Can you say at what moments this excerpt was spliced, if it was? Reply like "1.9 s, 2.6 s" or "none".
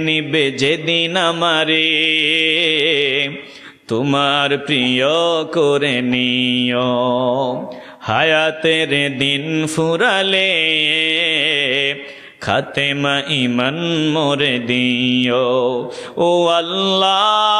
none